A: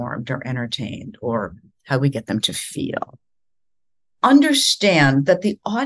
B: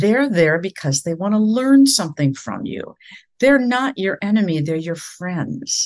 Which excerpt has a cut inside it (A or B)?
A